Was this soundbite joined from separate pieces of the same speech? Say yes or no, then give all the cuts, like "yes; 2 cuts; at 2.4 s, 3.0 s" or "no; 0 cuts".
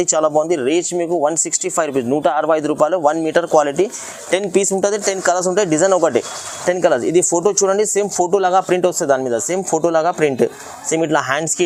no; 0 cuts